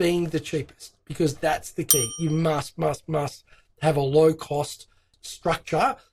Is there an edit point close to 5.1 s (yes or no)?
yes